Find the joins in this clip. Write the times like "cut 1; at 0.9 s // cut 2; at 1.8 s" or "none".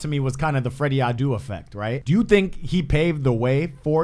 cut 1; at 2.0 s